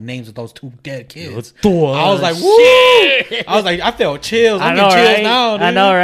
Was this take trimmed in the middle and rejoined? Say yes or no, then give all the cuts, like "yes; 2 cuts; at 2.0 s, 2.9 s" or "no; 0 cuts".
no; 0 cuts